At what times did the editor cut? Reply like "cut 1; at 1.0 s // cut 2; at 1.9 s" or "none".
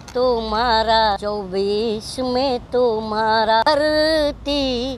cut 1; at 1.2 s // cut 2; at 3.6 s